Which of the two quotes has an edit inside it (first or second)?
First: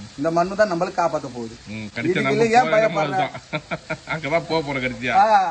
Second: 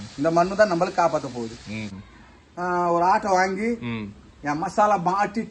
second